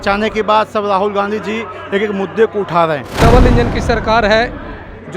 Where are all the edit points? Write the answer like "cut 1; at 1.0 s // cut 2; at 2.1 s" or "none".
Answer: cut 1; at 3.2 s